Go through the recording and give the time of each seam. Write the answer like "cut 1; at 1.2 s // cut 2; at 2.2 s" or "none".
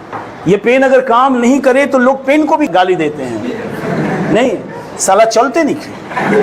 cut 1; at 2.7 s